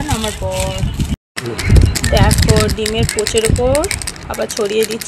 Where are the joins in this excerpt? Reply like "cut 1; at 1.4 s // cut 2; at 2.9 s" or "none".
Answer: cut 1; at 1.3 s